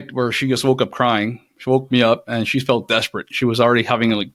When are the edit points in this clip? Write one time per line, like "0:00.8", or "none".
none